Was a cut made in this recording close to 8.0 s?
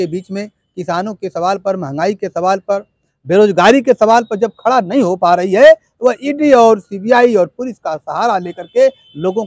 no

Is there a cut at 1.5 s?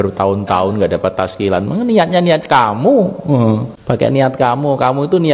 no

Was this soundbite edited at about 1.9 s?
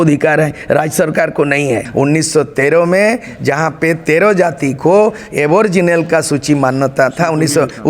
yes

